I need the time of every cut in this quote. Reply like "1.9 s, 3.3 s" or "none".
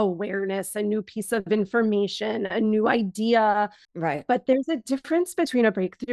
3.8 s